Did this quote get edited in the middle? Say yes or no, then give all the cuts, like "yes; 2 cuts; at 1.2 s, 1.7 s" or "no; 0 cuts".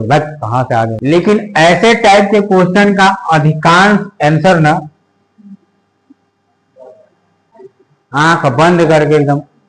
yes; 2 cuts; at 1.0 s, 7.4 s